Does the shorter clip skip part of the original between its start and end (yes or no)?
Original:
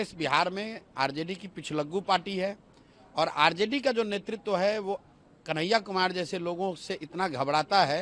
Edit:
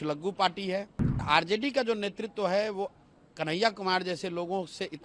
yes